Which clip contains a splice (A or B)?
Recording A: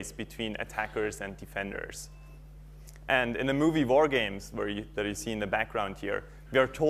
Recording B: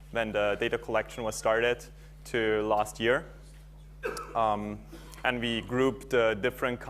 B